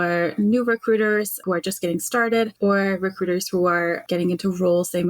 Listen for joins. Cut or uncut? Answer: cut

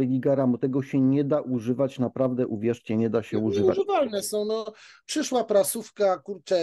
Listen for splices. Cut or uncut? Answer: uncut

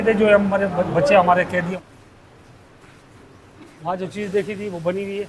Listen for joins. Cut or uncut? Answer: cut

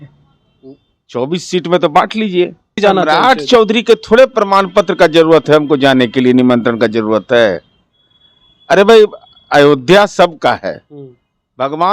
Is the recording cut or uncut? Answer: cut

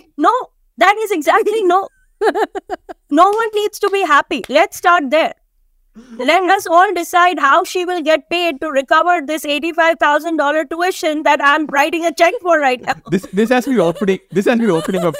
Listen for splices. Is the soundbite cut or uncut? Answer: uncut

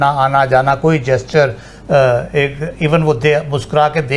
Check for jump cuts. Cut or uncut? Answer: uncut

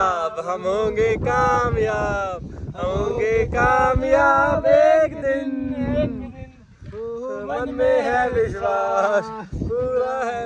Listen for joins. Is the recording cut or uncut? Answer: uncut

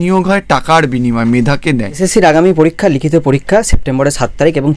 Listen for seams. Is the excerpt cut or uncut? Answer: cut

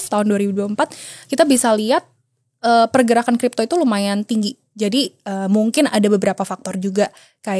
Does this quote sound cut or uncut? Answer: uncut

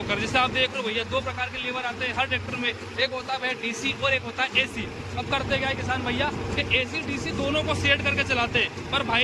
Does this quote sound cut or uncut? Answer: uncut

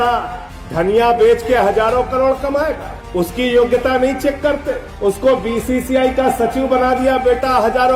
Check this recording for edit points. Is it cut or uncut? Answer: uncut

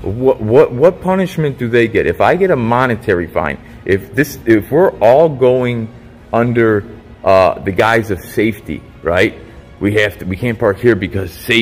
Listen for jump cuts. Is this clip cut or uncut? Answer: uncut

